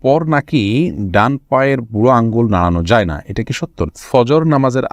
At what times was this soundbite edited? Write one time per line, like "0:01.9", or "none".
0:03.8